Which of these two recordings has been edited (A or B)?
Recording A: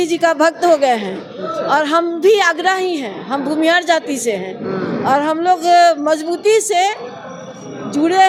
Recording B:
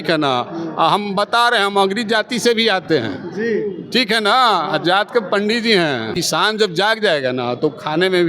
B